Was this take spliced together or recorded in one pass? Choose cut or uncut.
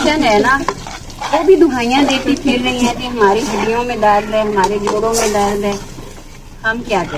uncut